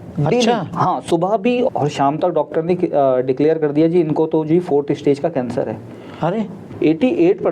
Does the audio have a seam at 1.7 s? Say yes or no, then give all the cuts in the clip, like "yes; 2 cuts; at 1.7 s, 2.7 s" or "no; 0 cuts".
yes; 2 cuts; at 1.7 s, 6.6 s